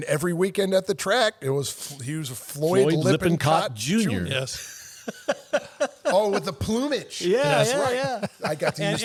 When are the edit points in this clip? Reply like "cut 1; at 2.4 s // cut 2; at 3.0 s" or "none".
none

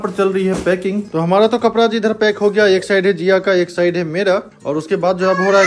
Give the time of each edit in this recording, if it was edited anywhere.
cut 1; at 1.1 s

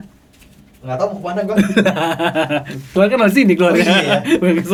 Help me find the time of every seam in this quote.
none

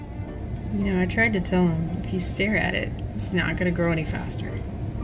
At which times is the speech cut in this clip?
none

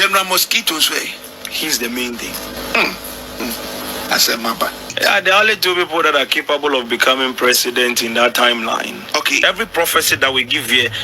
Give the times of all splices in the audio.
cut 1; at 2.6 s // cut 2; at 3.4 s // cut 3; at 4.9 s // cut 4; at 9.4 s

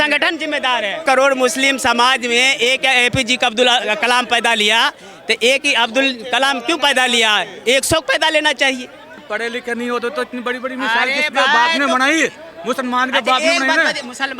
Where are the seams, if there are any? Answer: cut 1; at 1.0 s // cut 2; at 9.2 s

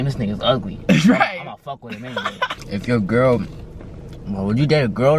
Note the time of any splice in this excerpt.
cut 1; at 2.6 s

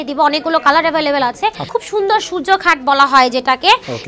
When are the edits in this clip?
cut 1; at 1.7 s

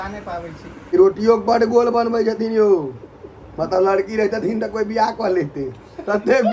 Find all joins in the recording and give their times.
cut 1; at 0.9 s

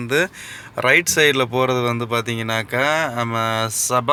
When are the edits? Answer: none

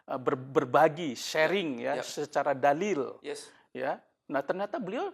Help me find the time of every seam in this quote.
none

